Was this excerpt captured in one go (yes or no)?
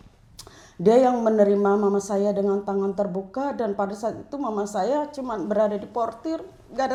yes